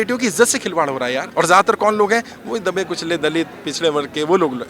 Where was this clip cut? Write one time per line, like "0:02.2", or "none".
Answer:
0:01.2